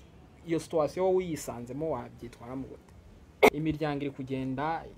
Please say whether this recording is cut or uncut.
cut